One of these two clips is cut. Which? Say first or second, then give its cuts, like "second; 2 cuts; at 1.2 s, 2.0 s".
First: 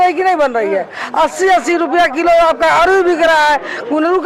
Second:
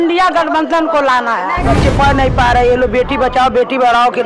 second; 1 cut; at 1.6 s